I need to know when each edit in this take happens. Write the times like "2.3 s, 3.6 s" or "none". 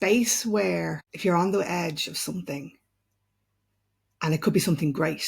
1.1 s